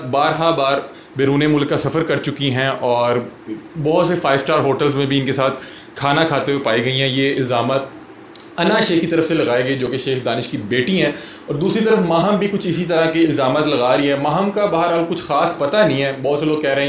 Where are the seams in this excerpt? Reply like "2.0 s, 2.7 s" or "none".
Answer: none